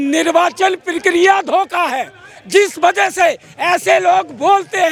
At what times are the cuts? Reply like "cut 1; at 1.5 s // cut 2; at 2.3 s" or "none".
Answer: none

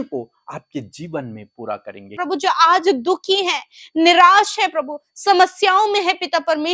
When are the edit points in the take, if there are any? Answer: cut 1; at 2.1 s

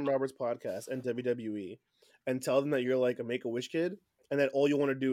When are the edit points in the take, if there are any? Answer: none

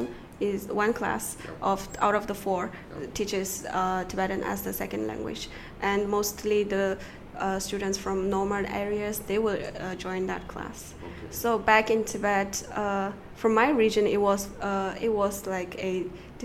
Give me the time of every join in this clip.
none

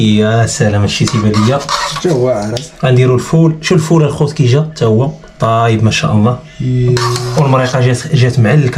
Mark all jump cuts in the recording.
none

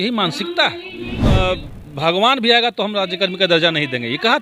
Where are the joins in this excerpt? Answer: cut 1; at 1.2 s

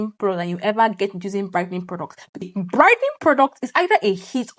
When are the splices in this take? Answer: cut 1; at 2.4 s

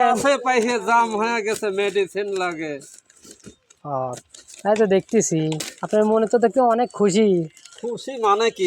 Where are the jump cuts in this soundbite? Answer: cut 1; at 5.7 s

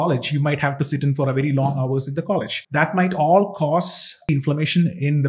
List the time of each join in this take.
cut 1; at 2.6 s // cut 2; at 4.3 s

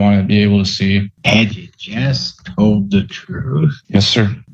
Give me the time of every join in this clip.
cut 1; at 1.1 s // cut 2; at 3.8 s

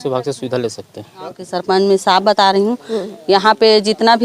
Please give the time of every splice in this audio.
cut 1; at 1.5 s

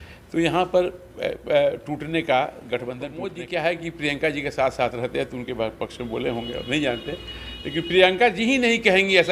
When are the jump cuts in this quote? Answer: cut 1; at 3.3 s

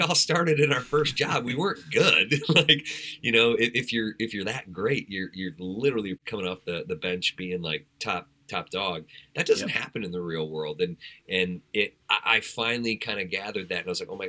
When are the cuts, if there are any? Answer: cut 1; at 6.2 s

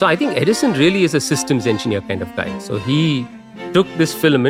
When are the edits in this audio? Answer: none

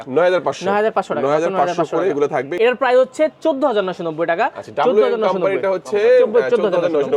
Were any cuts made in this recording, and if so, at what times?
cut 1; at 2.5 s

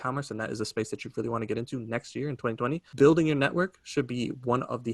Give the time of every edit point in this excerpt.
cut 1; at 2.9 s

